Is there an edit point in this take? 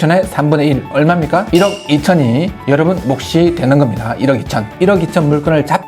yes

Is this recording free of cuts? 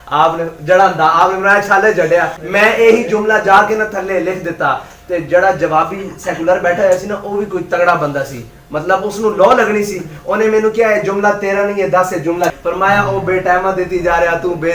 no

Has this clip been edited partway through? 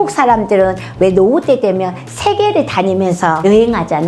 no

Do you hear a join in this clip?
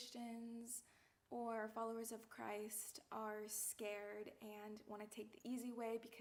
no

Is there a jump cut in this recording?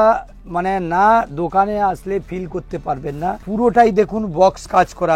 yes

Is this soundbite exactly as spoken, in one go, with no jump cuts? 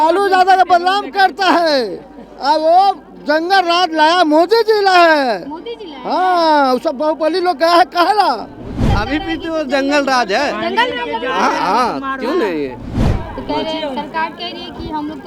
no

